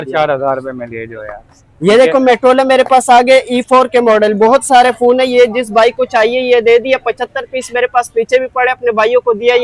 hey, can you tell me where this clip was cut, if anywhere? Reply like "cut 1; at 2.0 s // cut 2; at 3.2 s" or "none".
none